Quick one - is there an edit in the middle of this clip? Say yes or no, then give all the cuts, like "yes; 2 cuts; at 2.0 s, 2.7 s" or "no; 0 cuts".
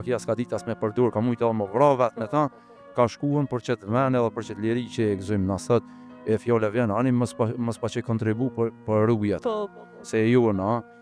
no; 0 cuts